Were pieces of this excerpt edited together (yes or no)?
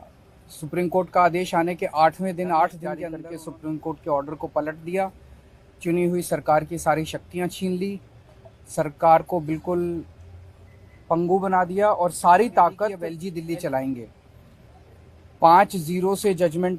yes